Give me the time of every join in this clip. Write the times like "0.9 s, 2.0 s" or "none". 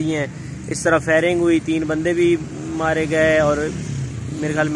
none